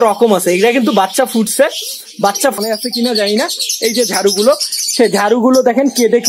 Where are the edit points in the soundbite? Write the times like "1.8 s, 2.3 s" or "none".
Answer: 2.6 s